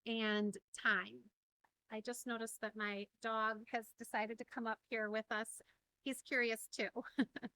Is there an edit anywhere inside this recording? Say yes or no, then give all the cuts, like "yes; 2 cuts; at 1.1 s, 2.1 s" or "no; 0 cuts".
yes; 2 cuts; at 1.7 s, 5.6 s